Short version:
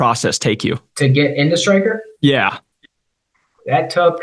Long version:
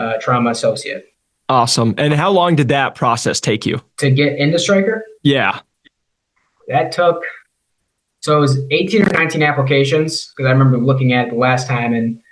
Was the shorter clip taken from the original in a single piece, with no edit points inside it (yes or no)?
yes